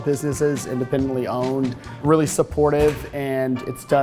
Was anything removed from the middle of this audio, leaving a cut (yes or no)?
yes